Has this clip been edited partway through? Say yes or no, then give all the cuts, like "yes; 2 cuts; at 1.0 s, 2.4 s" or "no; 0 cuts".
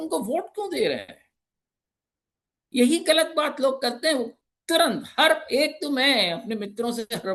no; 0 cuts